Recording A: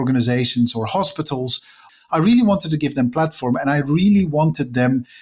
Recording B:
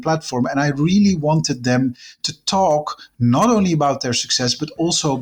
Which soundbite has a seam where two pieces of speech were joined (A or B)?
A